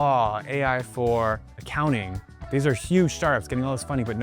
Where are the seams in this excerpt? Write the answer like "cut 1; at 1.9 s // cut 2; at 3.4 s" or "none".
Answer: cut 1; at 1.6 s

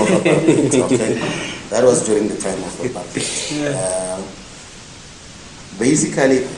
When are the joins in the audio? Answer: none

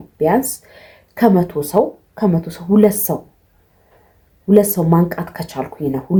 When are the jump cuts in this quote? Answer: none

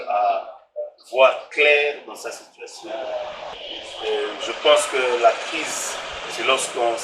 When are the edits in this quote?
cut 1; at 3.6 s

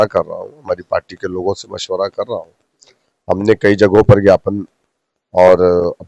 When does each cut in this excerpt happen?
none

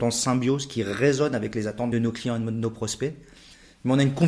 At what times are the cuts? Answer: cut 1; at 1.9 s

